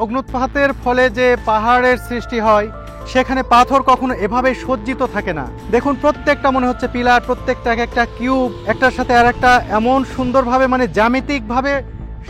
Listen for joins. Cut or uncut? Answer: cut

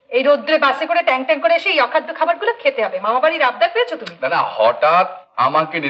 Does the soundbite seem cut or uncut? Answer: uncut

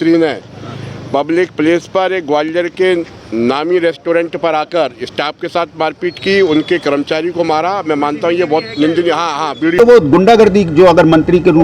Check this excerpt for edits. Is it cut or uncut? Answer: cut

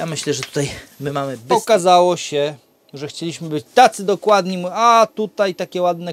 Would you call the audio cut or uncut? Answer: cut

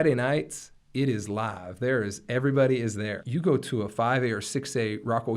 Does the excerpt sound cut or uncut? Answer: cut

